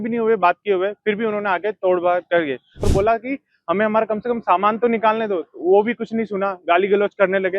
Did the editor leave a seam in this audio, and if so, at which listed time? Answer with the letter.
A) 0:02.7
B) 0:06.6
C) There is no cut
A